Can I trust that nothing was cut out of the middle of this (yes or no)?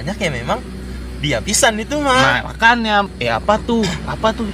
no